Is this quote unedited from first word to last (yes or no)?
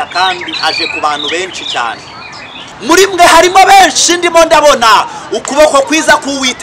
no